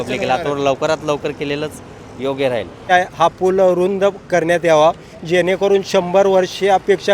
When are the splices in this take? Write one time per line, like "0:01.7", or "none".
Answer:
0:02.8